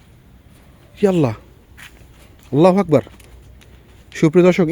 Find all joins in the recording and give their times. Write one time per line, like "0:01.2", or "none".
none